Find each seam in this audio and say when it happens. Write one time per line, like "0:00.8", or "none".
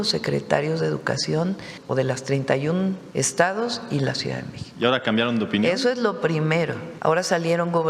0:01.7
0:03.0
0:06.8

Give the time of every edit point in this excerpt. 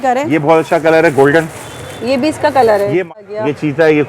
0:03.1

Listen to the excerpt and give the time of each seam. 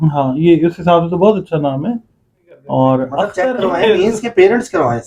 0:03.3

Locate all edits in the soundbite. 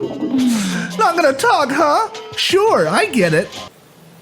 none

